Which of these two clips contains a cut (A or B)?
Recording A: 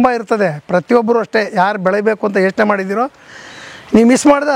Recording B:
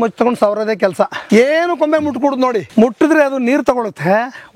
B